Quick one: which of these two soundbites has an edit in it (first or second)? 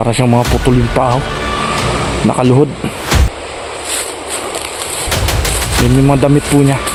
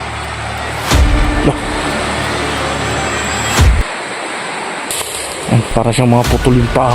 second